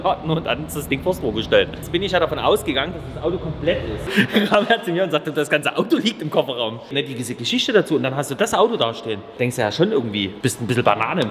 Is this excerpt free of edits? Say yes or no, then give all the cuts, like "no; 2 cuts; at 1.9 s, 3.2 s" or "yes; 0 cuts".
no; 5 cuts; at 1.8 s, 4.0 s, 6.9 s, 9.3 s, 10.3 s